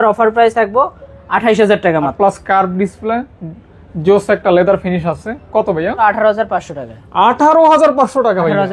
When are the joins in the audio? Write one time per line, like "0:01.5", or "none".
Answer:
0:02.1
0:06.0